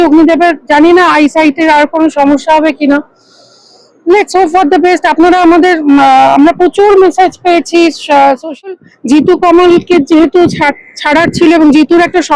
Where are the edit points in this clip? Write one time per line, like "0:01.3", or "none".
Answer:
0:08.7